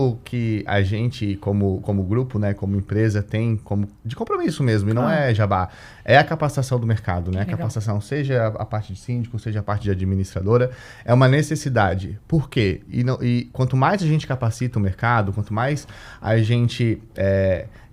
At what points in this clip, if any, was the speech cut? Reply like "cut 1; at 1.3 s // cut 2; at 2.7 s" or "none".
none